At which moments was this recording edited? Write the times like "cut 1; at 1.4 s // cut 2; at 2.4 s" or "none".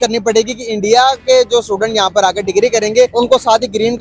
cut 1; at 3.1 s